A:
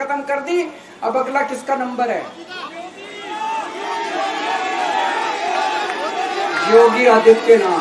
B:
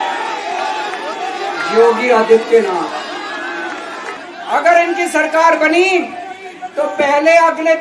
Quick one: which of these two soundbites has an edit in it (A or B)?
B